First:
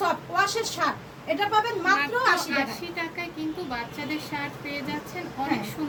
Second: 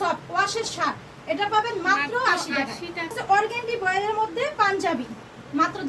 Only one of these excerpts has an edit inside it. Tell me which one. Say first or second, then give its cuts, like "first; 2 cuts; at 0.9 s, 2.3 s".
second; 1 cut; at 3.2 s